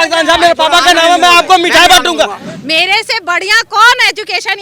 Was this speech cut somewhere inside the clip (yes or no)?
yes